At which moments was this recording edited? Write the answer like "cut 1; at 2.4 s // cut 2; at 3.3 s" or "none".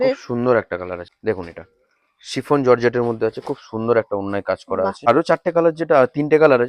cut 1; at 1.1 s // cut 2; at 5.0 s